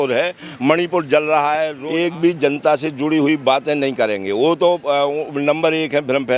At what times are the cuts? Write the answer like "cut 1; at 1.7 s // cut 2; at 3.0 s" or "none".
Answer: cut 1; at 1.8 s